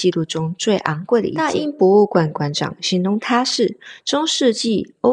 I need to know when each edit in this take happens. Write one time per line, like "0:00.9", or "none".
0:01.5